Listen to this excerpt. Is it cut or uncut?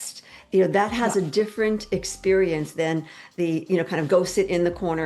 uncut